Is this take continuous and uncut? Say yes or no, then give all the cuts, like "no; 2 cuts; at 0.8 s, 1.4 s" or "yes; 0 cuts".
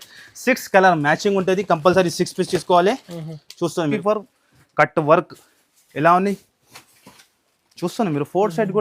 no; 1 cut; at 3.9 s